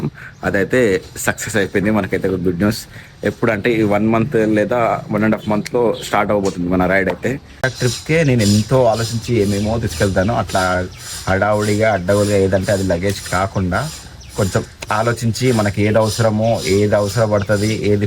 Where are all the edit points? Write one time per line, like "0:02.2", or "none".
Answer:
0:07.6